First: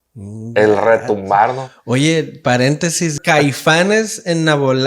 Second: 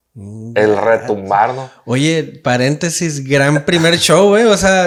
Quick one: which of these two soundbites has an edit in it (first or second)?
first